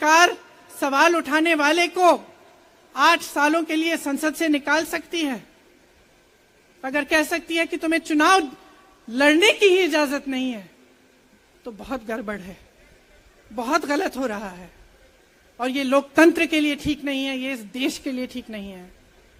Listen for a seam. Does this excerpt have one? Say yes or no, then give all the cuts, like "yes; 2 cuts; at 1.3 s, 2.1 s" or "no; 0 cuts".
no; 0 cuts